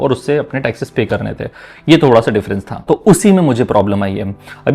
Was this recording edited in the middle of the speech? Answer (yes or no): no